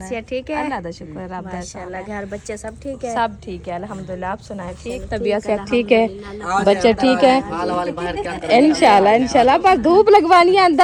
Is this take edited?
no; 0 cuts

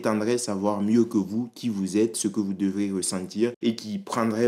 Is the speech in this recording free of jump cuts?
yes; 0 cuts

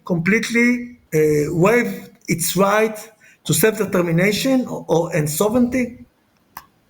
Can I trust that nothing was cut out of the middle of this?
no; 1 cut; at 0.9 s

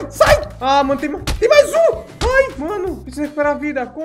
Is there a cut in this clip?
no; 0 cuts

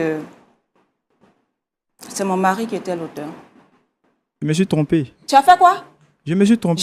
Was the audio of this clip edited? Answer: yes; 1 cut; at 4.3 s

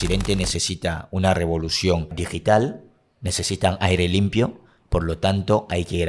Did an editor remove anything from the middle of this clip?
yes; 1 cut; at 2.3 s

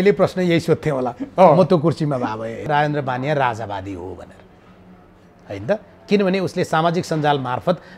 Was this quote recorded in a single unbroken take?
no; 1 cut; at 2.7 s

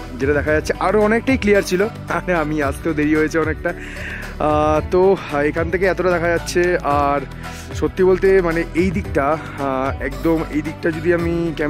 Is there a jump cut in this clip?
no; 0 cuts

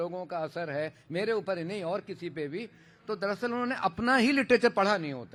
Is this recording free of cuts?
yes; 0 cuts

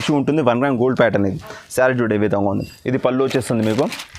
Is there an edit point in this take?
no; 0 cuts

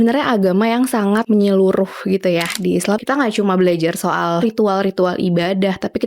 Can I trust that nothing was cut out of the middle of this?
no; 3 cuts; at 1.2 s, 3.0 s, 4.4 s

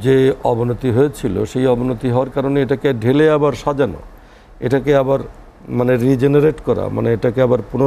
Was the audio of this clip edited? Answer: no; 0 cuts

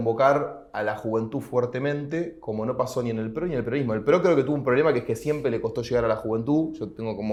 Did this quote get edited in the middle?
no; 0 cuts

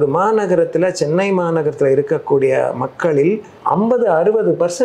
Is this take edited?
yes; 1 cut; at 3.5 s

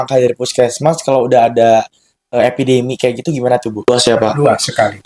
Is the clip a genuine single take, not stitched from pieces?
no; 1 cut; at 3.9 s

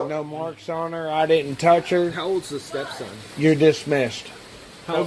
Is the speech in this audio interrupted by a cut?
no; 0 cuts

